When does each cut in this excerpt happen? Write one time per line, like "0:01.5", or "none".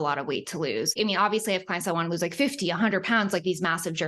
0:01.0